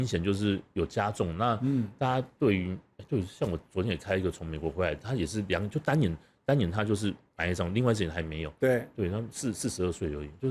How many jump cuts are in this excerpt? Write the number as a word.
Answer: zero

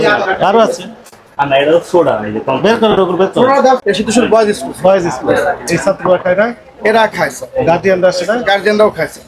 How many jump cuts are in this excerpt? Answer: one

